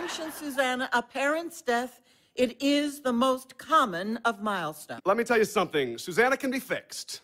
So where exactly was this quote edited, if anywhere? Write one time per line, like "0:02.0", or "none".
0:04.8